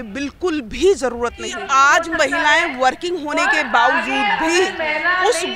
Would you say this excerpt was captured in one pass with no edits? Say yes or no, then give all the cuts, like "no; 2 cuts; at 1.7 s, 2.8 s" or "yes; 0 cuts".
no; 1 cut; at 1.5 s